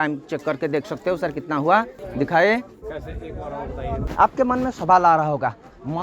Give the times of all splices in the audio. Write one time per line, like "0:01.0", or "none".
0:02.0
0:04.1